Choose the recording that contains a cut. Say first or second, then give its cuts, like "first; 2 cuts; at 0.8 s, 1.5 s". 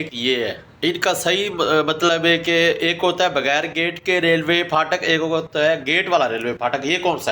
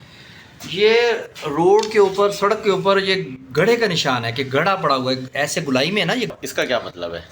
second; 1 cut; at 6.3 s